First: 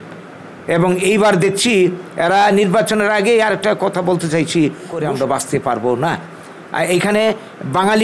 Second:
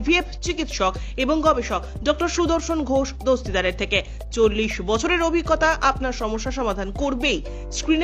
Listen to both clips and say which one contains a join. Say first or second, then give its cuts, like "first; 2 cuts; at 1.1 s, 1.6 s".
first; 1 cut; at 5.0 s